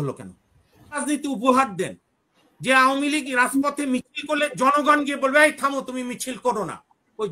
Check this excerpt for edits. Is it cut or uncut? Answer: cut